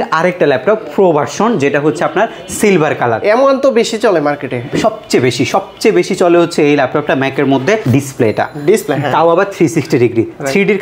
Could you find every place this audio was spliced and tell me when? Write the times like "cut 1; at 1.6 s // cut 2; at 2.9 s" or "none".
cut 1; at 7.8 s